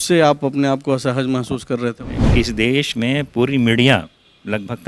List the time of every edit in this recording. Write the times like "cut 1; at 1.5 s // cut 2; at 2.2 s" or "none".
cut 1; at 2.1 s